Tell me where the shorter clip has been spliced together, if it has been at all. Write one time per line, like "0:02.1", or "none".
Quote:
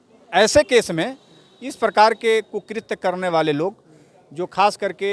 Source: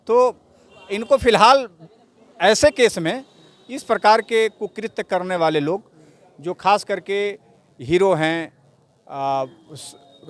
none